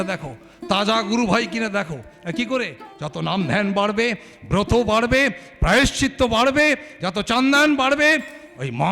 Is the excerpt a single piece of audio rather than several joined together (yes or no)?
no